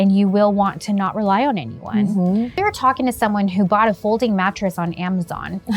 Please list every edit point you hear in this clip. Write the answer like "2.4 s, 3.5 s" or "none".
2.6 s